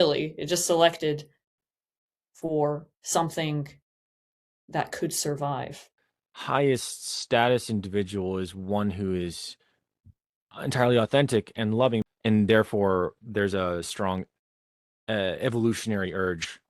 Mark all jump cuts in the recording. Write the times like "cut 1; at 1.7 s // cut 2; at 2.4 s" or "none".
cut 1; at 5.9 s // cut 2; at 12.1 s